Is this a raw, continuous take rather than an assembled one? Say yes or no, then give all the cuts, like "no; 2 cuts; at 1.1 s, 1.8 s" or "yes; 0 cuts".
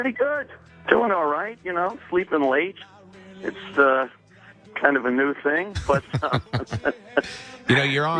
yes; 0 cuts